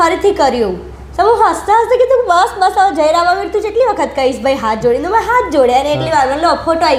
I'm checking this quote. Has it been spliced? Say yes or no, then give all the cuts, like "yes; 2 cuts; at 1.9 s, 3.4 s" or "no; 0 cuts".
no; 0 cuts